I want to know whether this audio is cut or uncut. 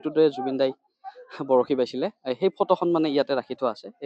uncut